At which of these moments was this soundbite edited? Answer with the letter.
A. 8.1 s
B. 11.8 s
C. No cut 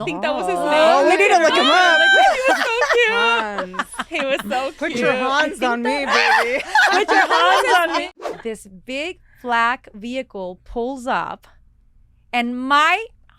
A